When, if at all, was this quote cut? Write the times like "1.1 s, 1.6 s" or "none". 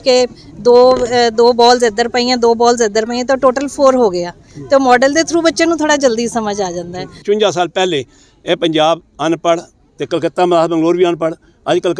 7.2 s

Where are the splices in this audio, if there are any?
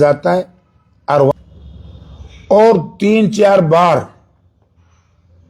1.3 s

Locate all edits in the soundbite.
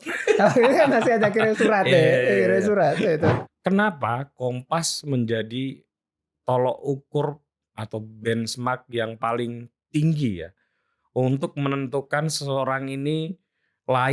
3.5 s

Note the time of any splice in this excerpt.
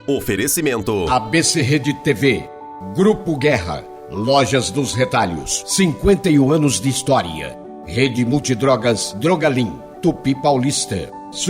1.1 s

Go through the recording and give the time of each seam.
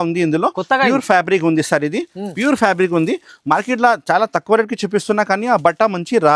none

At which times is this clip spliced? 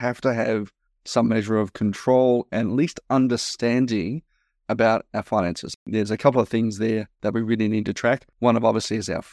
5.9 s, 7.1 s, 8.3 s

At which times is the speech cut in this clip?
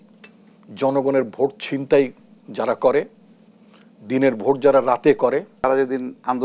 5.5 s

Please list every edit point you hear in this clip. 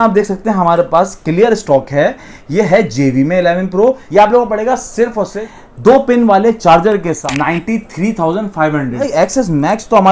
4.0 s, 5.5 s, 7.2 s, 9.0 s

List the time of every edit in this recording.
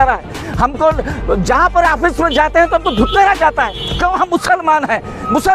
none

